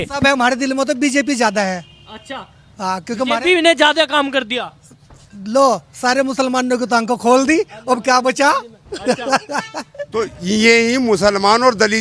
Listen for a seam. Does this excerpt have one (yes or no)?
yes